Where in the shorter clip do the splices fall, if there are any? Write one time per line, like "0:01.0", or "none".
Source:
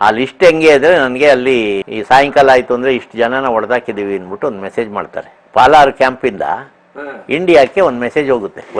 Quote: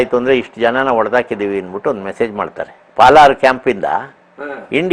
none

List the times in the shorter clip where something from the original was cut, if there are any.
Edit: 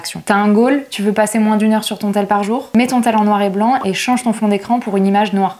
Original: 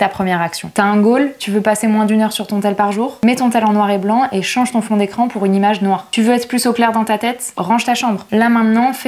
none

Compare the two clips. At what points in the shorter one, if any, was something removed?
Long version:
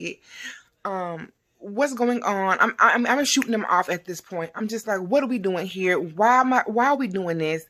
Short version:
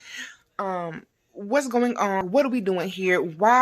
0:02.2

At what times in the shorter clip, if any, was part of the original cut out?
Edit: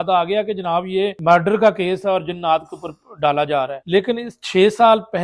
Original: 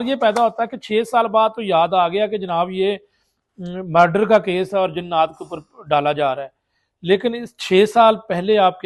0:01.2
0:03.8

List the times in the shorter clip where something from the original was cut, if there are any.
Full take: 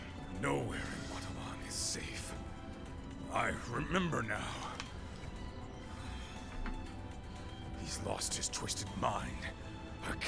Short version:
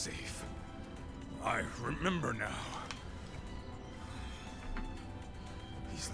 none

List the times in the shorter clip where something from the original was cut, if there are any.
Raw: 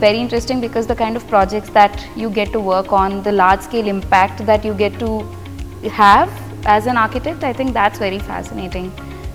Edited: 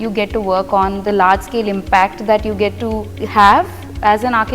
0:03.1

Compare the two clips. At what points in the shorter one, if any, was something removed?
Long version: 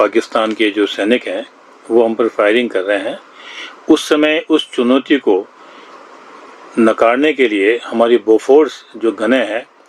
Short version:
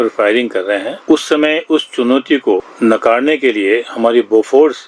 0:00.9
0:02.7

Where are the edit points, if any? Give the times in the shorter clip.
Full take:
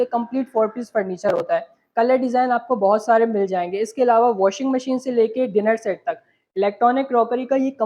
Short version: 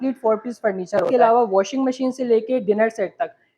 0:01.1

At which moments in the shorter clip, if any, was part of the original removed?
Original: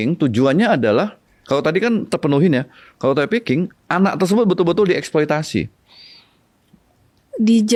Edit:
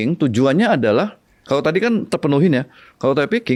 none

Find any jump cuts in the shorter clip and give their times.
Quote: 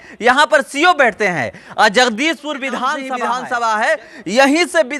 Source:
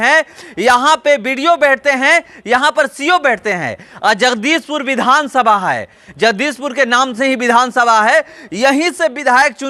0:03.3

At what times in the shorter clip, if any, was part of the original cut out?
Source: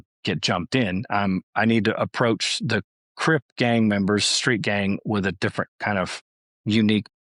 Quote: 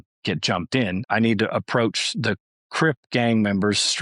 0:01.0

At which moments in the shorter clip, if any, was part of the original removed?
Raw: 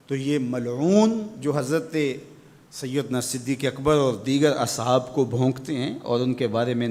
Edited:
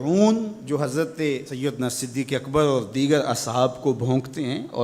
0:01.5

